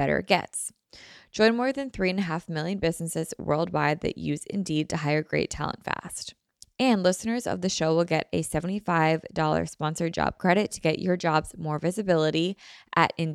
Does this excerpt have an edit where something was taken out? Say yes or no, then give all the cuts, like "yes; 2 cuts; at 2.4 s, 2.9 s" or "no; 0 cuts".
no; 0 cuts